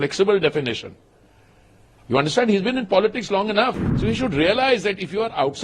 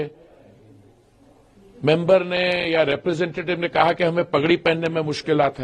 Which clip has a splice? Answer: first; 1 cut; at 3.9 s

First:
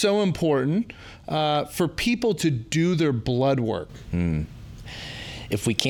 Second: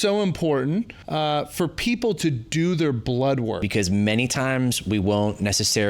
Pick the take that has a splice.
second; 2 cuts; at 1.0 s, 3.7 s

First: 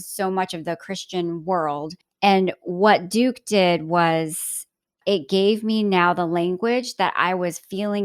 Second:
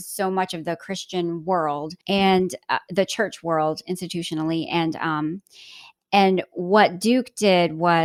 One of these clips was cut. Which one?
first; 1 cut; at 1.9 s

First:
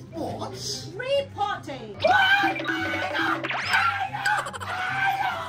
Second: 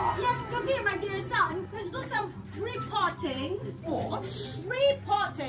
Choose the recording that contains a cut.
second; 1 cut; at 1.7 s

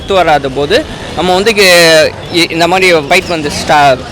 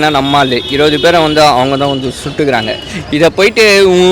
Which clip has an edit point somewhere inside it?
first; 1 cut; at 3.0 s

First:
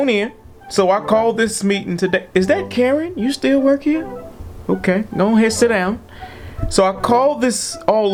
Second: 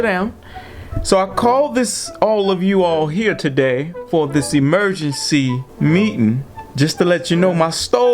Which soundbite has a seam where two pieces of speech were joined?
second; 2 cuts; at 5.6 s, 6.6 s

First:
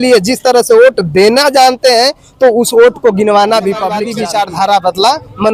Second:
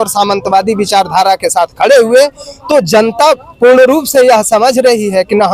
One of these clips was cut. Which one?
first; 1 cut; at 4.1 s

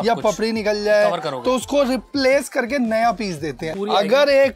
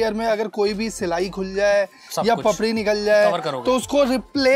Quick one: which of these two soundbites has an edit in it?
first; 1 cut; at 3.6 s

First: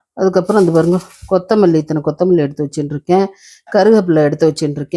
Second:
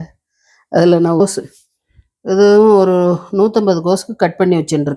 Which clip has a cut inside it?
second; 1 cut; at 1.2 s

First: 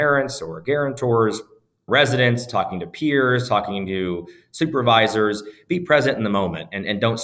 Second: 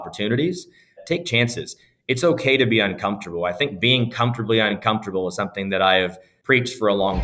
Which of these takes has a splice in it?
second; 2 cuts; at 1.0 s, 6.3 s

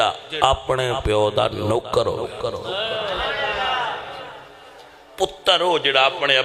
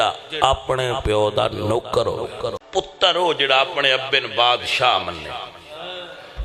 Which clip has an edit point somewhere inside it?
second; 1 cut; at 2.6 s

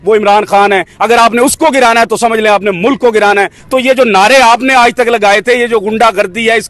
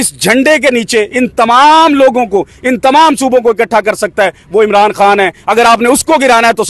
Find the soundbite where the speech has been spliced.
first; 1 cut; at 3.6 s

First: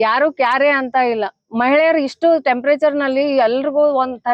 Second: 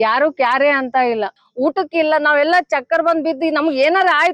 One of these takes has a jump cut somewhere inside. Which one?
second; 1 cut; at 1.4 s

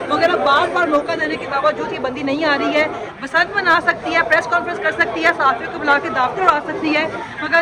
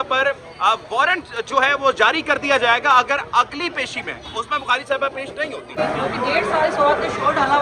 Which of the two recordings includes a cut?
second; 1 cut; at 6.0 s

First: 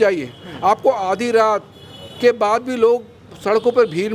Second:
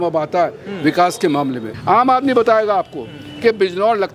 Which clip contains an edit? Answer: second; 1 cut; at 1.7 s

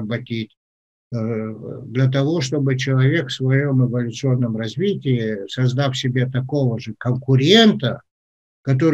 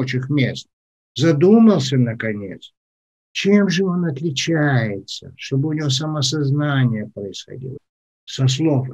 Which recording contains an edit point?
second; 1 cut; at 7.8 s

